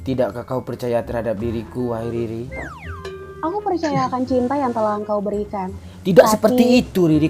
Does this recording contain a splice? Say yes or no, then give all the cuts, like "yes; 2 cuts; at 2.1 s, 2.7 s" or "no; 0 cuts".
no; 0 cuts